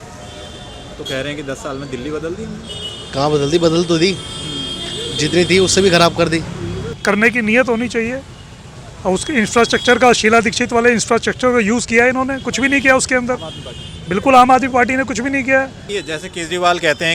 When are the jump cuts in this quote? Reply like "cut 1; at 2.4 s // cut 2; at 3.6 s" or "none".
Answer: cut 1; at 6.9 s // cut 2; at 15.8 s